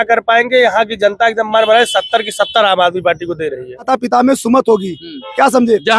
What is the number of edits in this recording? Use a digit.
1